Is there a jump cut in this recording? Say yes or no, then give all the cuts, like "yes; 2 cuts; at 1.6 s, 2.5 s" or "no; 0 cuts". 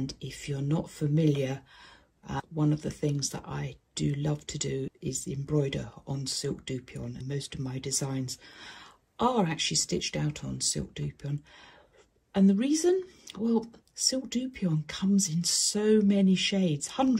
yes; 3 cuts; at 2.4 s, 4.9 s, 7.2 s